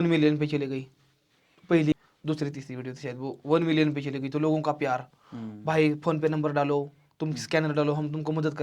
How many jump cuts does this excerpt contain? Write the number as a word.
zero